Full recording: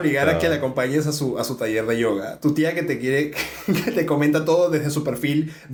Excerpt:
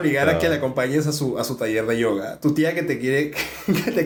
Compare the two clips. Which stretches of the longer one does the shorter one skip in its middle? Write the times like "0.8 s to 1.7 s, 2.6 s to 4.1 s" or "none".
none